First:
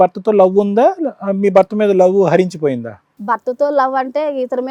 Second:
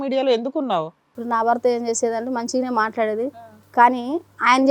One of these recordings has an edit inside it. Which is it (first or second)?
second